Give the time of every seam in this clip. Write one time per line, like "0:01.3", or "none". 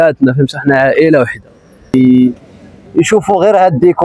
0:01.9